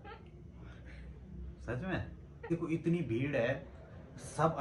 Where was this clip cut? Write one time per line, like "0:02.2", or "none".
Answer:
0:02.4